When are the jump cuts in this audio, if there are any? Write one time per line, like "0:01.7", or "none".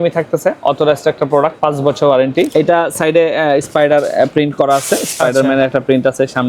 0:02.5